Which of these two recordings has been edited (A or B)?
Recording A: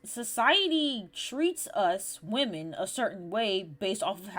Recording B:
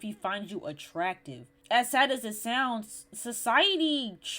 B